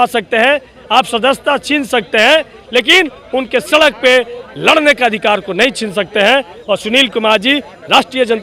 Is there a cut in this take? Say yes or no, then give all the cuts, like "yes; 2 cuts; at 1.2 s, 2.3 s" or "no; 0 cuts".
no; 0 cuts